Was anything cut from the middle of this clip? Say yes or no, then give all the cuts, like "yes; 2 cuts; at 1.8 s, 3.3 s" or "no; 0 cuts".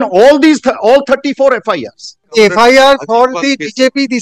yes; 1 cut; at 2.3 s